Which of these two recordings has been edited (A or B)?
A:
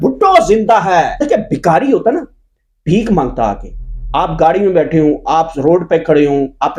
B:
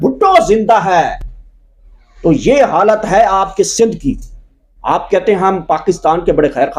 A